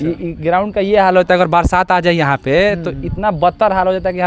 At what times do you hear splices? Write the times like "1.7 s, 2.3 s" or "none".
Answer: none